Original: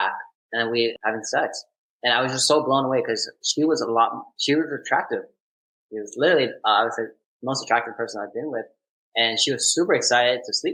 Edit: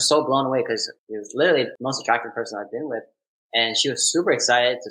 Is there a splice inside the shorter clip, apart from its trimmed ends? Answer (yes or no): yes